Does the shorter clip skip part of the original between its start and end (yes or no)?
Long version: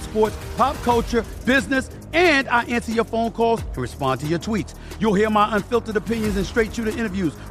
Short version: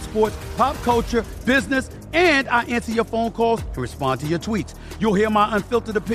no